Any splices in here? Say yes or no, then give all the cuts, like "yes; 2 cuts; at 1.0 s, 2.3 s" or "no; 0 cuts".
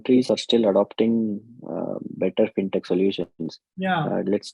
no; 0 cuts